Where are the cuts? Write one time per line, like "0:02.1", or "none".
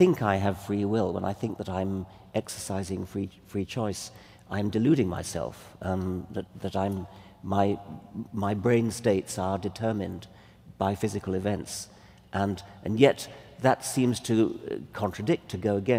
0:08.7